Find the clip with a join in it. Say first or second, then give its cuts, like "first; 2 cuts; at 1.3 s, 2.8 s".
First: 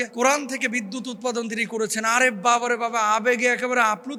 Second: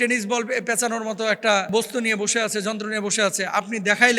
second; 1 cut; at 1.7 s